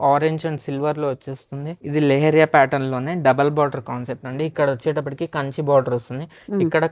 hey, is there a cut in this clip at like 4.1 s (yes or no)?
no